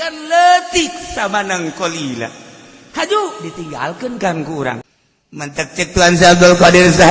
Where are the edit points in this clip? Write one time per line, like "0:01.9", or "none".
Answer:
0:04.8